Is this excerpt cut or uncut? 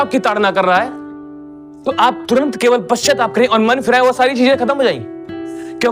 uncut